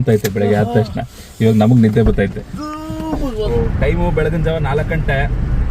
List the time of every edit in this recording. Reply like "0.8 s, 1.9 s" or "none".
3.5 s